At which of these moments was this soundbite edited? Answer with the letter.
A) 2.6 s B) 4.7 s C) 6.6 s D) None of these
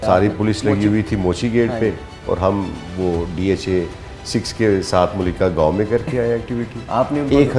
D